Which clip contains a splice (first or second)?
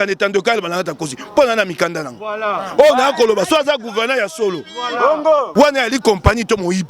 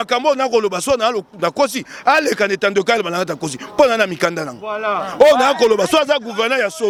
first